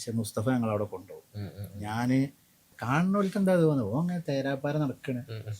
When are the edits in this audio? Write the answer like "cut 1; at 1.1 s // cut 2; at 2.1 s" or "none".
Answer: cut 1; at 2.7 s